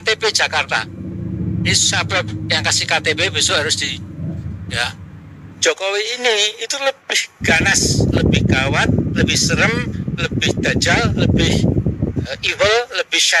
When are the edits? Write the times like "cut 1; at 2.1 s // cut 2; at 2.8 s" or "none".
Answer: cut 1; at 5.5 s